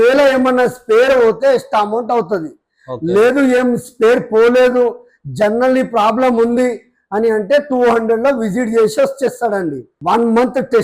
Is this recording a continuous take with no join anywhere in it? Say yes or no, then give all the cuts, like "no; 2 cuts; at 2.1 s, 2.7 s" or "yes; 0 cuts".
no; 1 cut; at 9.9 s